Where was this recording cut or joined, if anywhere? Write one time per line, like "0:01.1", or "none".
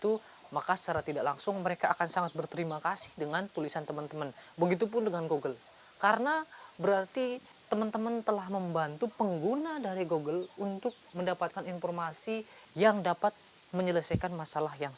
0:07.5
0:11.0
0:12.6